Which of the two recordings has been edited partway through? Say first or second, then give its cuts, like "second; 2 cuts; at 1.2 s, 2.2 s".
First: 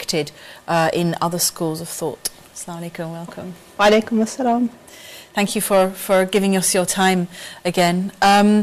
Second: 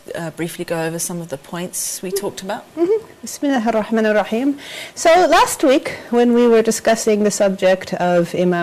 first; 1 cut; at 7.6 s